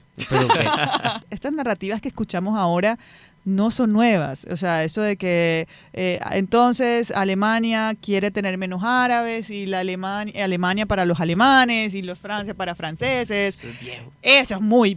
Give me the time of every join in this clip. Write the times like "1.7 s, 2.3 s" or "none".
1.2 s